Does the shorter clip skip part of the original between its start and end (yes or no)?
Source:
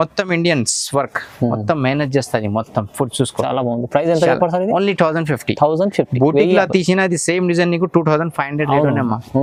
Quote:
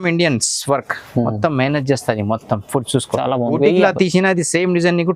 yes